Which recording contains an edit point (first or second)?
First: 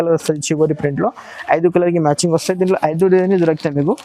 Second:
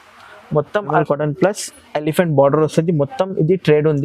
second